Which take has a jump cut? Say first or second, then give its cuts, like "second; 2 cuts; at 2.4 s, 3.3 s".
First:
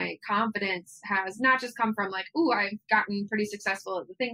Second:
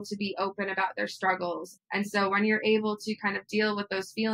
second; 1 cut; at 2.0 s